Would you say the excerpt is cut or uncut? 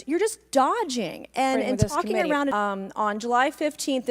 cut